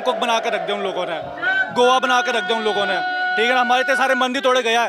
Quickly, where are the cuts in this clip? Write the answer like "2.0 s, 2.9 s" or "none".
none